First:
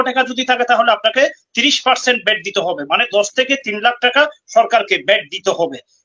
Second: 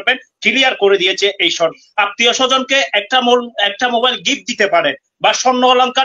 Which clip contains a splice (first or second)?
second